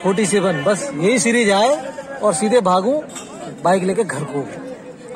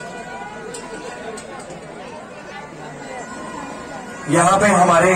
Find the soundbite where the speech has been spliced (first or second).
second